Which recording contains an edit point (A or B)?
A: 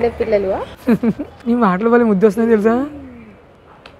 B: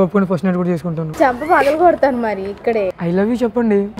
B